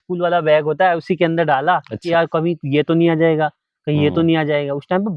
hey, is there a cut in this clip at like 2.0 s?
yes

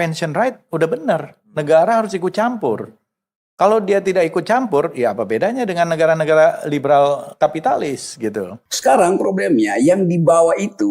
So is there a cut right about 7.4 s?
no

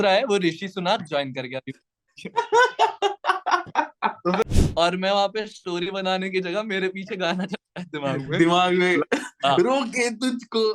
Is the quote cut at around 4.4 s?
yes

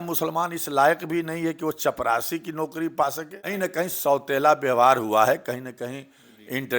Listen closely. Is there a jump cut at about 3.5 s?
yes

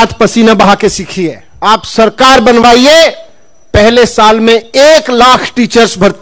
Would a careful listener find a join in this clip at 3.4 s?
no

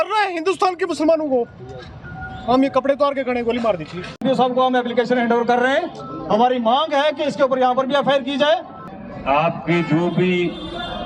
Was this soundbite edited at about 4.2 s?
yes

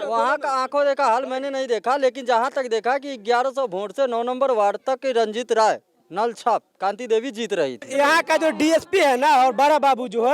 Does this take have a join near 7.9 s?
yes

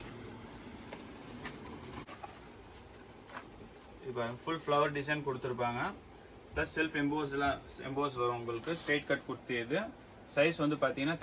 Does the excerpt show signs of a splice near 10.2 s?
no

